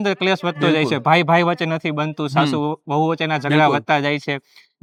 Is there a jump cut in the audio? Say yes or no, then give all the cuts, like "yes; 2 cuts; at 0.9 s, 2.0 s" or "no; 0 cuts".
no; 0 cuts